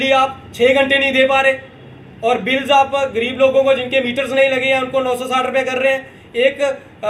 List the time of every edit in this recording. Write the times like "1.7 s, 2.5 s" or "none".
none